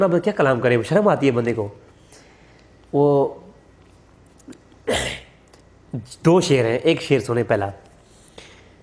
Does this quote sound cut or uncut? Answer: uncut